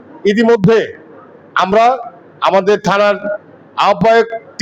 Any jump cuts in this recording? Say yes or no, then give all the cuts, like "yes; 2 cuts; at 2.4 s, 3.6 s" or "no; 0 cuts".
no; 0 cuts